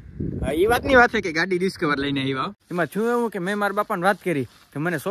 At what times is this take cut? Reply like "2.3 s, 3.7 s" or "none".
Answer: 2.5 s